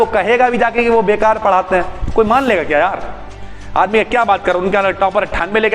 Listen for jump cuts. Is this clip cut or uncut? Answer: uncut